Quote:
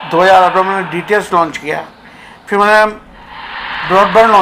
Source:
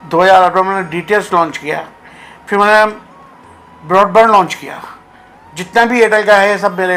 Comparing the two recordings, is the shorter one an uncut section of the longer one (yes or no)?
yes